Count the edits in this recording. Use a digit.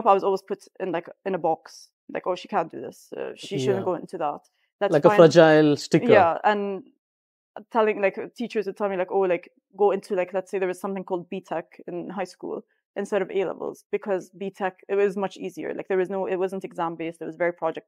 0